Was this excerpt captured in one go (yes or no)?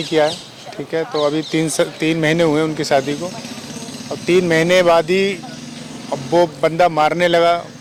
yes